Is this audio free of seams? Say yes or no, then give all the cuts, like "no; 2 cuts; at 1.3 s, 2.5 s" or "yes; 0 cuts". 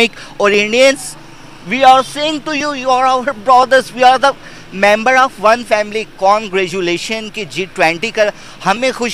yes; 0 cuts